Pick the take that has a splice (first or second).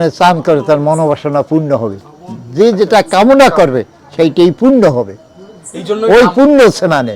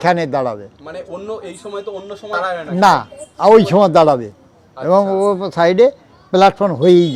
second